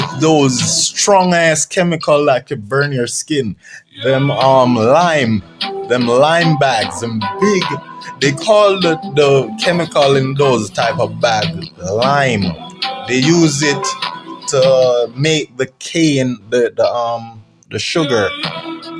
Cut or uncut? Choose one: uncut